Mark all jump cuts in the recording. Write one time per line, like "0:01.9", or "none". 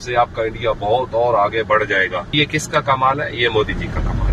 0:02.3

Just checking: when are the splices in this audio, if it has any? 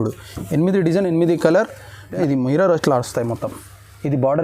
0:02.1

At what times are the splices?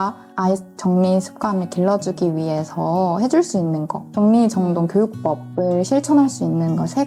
none

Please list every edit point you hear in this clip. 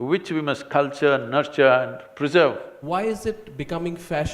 0:02.7

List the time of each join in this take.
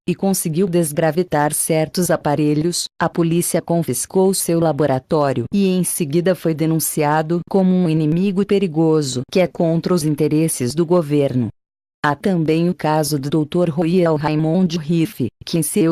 0:04.8

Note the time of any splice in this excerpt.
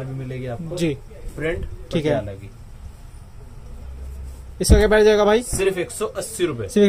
none

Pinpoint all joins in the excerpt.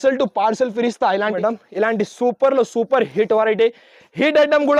0:01.4

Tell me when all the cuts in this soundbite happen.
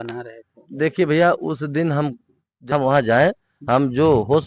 0:02.7

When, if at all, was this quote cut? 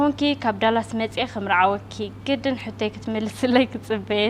none

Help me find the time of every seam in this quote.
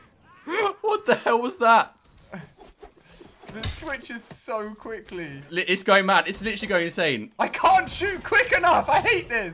0:05.5
0:07.3

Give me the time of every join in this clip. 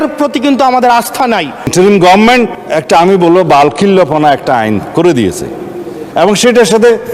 0:01.7
0:02.6

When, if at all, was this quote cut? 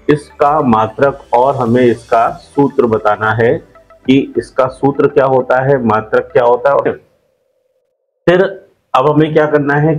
0:06.9

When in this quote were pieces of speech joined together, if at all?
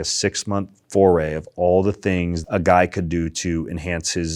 0:02.4

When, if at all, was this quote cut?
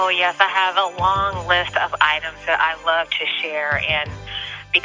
none

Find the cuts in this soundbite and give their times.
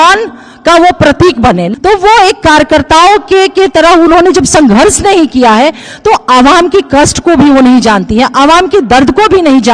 0:01.7

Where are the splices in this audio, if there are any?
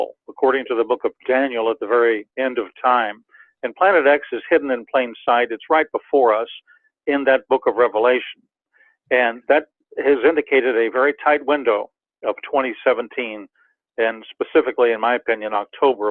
none

